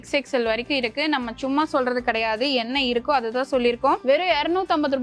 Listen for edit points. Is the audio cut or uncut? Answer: cut